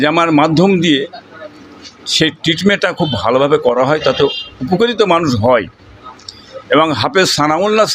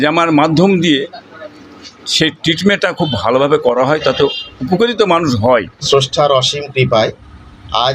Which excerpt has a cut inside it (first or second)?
second